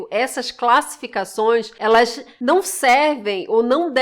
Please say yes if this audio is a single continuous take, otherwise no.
no